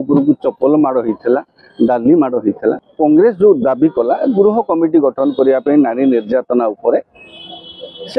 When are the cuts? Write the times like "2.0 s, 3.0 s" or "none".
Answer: 2.9 s